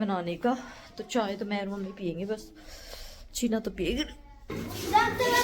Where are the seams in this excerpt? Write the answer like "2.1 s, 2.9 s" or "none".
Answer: 4.5 s